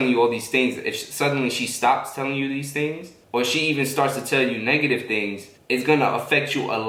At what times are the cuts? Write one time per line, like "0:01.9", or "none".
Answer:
none